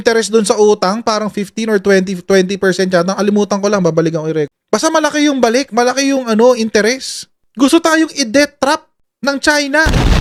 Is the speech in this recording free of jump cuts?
yes; 0 cuts

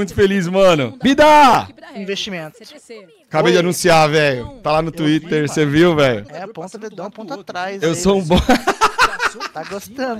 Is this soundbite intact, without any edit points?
no; 2 cuts; at 0.9 s, 6.3 s

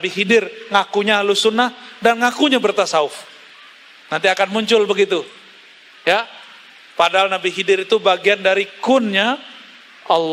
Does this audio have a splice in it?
no; 0 cuts

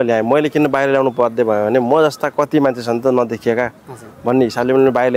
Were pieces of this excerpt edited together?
no; 0 cuts

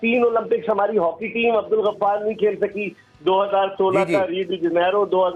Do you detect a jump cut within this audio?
no; 0 cuts

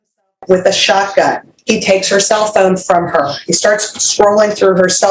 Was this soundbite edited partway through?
yes; 1 cut; at 1.5 s

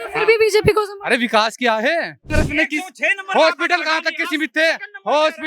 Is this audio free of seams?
no; 1 cut; at 2.3 s

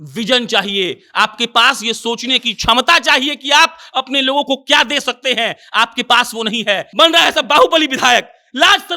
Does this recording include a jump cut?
yes; 1 cut; at 6.9 s

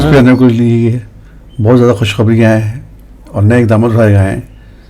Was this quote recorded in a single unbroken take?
yes; 0 cuts

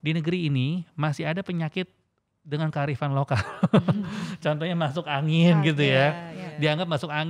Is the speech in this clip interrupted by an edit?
no; 0 cuts

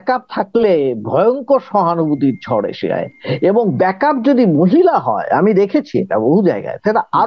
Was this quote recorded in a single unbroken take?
yes; 0 cuts

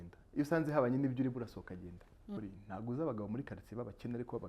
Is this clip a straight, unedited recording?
no; 1 cut; at 2.4 s

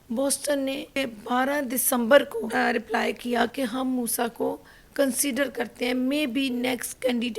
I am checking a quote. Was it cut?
yes; 2 cuts; at 1.0 s, 2.5 s

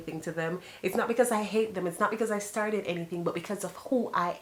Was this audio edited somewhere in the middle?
no; 0 cuts

